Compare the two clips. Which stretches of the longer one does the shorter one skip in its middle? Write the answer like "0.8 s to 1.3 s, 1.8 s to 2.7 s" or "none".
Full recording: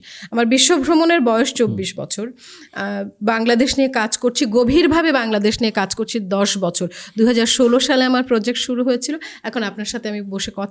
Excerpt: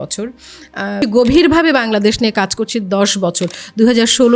3.0 s to 4.4 s